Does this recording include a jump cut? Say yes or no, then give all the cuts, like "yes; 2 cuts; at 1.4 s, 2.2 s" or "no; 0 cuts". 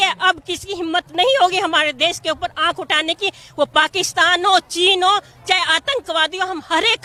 no; 0 cuts